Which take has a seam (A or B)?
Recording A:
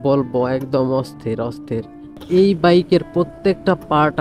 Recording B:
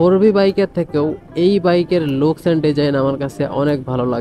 A